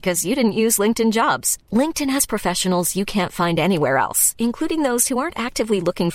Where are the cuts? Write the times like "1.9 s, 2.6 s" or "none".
none